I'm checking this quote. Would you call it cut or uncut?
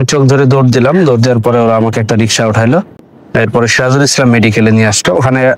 uncut